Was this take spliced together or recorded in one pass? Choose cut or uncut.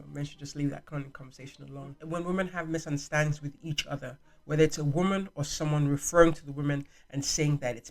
cut